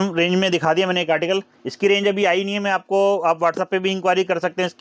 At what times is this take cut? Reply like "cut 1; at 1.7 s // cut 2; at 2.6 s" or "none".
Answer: none